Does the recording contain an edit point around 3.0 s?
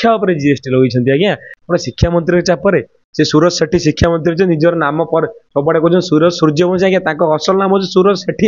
no; 1 cut; at 1.5 s

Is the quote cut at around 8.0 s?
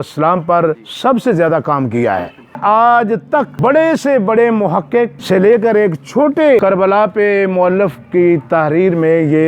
no; 5 cuts; at 0.9 s, 2.6 s, 3.6 s, 5.2 s, 6.6 s

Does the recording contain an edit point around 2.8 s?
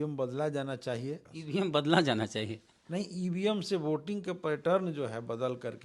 no; 1 cut; at 1.3 s

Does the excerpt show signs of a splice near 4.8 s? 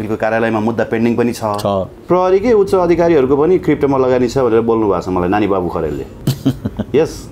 no; 2 cuts; at 1.9 s, 6.1 s

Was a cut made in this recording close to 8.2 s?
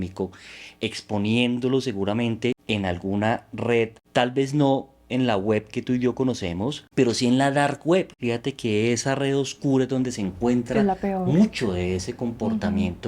yes; 4 cuts; at 2.6 s, 4.0 s, 6.8 s, 8.2 s

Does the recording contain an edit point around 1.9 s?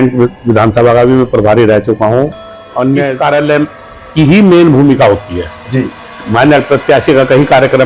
no; 1 cut; at 3.1 s

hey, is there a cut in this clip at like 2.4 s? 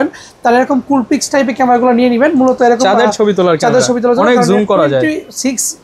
no; 0 cuts

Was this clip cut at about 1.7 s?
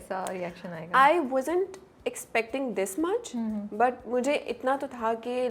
no; 0 cuts

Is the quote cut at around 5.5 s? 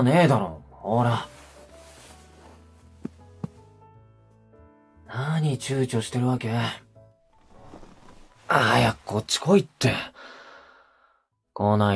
yes; 1 cut; at 5.5 s

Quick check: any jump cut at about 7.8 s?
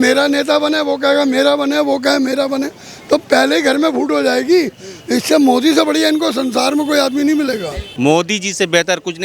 yes; 1 cut; at 7.8 s

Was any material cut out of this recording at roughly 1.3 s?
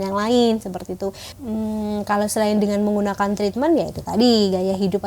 yes; 1 cut; at 1.3 s

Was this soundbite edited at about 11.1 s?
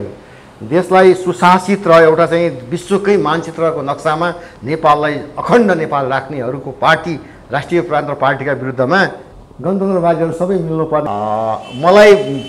yes; 1 cut; at 11.1 s

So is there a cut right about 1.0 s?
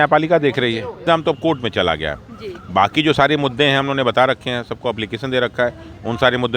yes; 1 cut; at 1.0 s

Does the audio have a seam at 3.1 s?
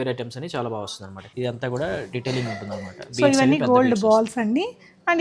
no; 1 cut; at 1.3 s

